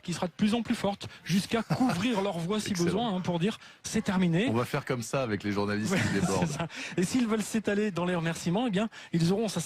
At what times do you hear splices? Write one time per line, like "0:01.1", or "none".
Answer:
0:03.8